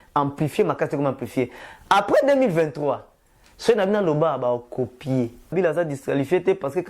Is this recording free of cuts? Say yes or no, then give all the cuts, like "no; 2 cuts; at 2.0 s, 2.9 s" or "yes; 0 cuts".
no; 1 cut; at 5.5 s